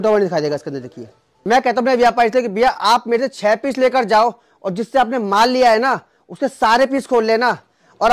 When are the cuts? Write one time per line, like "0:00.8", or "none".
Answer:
0:01.3